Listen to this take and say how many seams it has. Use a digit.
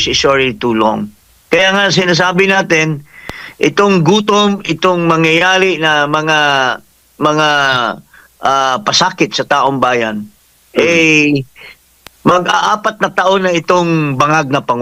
0